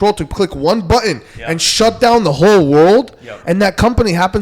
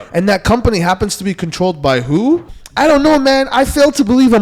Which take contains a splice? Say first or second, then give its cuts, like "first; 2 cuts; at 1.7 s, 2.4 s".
second; 1 cut; at 2.6 s